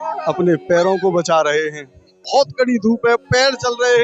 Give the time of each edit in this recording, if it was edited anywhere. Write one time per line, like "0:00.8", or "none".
0:02.2